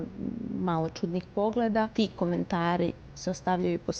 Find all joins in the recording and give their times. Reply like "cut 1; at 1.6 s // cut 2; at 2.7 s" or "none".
cut 1; at 1.9 s